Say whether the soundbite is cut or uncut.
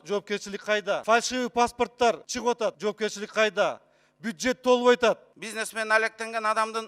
cut